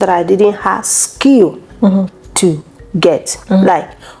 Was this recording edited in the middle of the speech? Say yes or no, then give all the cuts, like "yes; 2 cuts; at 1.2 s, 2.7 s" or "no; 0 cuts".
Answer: no; 0 cuts